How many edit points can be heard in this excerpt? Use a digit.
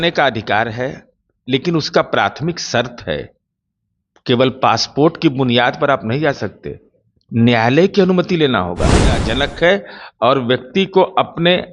1